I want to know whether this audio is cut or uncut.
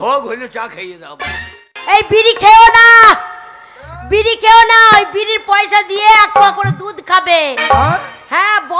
cut